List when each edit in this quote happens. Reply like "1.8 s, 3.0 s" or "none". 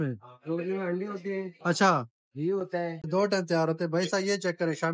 3.0 s

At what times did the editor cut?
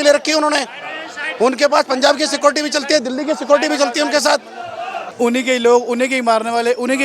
5.0 s

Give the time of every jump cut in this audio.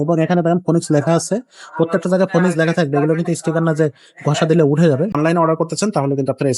5.2 s

